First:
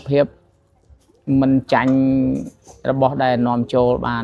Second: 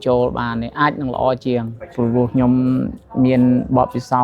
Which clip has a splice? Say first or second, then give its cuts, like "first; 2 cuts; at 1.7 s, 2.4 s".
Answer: second; 1 cut; at 1.8 s